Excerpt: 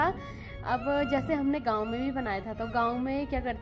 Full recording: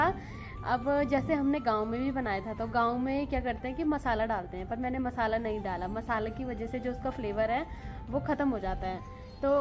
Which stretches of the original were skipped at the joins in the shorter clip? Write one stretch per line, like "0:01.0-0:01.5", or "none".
none